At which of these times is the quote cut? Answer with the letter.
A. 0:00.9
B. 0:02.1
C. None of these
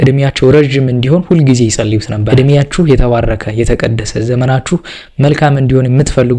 B